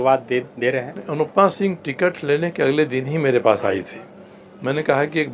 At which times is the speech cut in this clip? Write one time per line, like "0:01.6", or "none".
none